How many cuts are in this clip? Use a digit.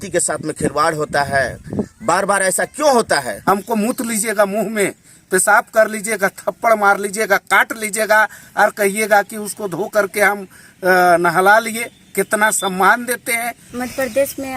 2